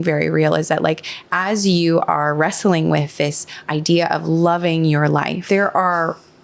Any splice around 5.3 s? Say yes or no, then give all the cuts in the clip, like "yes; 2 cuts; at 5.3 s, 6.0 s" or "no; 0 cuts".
yes; 1 cut; at 5.3 s